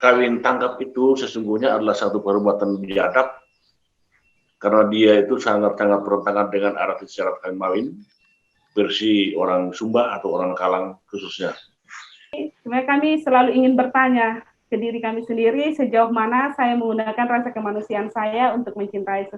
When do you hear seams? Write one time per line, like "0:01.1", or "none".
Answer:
0:12.4

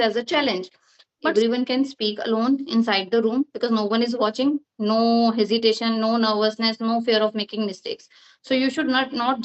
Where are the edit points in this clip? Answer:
0:01.3

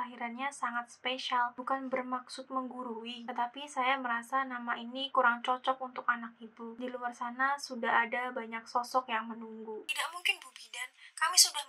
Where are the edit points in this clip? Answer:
0:09.9

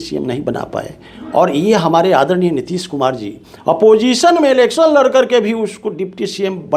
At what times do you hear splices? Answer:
none

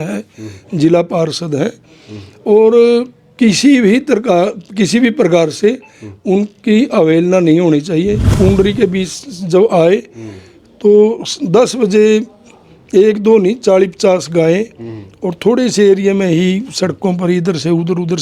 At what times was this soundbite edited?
0:08.3

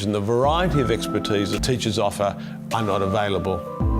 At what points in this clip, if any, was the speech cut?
0:01.6

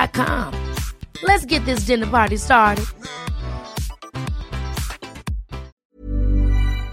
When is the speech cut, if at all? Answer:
0:05.7

